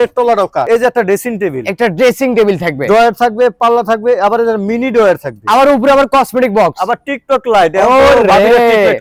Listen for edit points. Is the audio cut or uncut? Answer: uncut